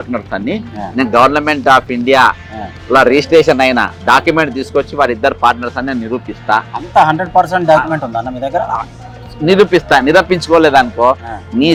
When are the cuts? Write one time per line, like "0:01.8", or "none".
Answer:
none